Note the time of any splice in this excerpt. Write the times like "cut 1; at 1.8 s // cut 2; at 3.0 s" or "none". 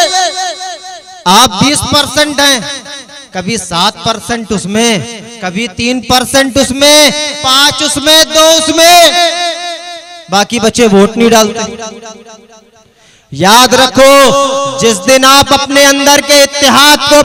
none